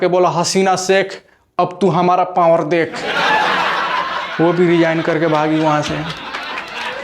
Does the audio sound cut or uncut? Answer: cut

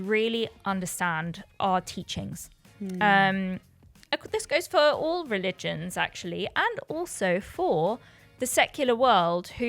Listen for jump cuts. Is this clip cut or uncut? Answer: cut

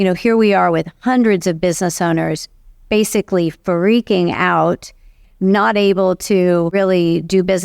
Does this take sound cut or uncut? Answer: cut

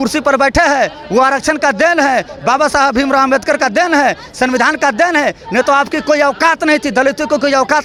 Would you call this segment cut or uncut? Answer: uncut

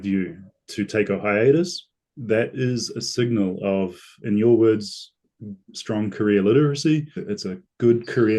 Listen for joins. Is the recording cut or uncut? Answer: cut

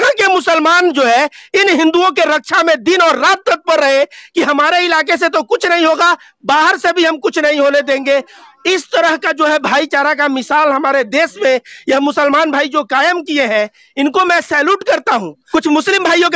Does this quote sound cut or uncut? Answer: uncut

